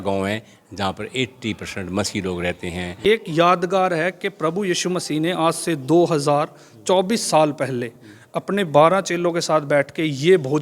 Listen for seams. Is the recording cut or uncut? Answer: cut